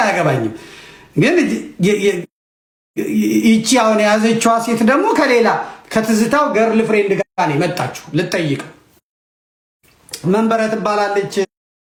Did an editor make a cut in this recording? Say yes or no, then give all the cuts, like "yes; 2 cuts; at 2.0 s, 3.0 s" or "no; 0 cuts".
no; 0 cuts